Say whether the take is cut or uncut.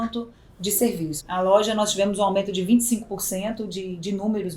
cut